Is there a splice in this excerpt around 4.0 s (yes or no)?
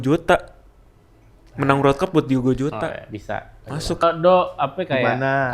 yes